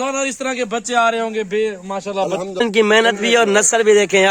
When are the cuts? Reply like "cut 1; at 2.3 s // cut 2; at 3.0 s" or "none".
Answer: cut 1; at 2.6 s